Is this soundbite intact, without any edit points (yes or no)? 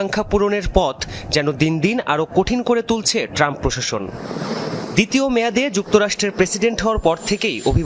no